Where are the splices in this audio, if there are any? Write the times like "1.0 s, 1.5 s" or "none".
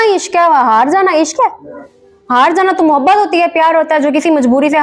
none